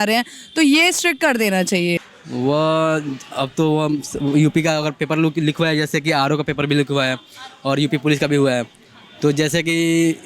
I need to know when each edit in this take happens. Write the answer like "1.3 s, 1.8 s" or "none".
2.0 s